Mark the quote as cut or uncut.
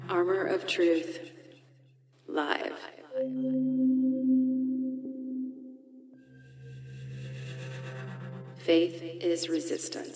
uncut